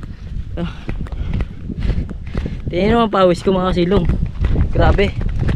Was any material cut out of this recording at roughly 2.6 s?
no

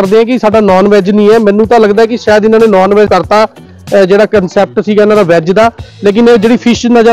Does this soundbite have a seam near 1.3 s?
no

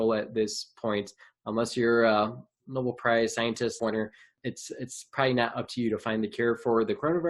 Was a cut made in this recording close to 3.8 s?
yes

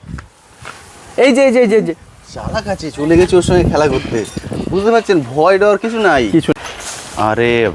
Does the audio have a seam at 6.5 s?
yes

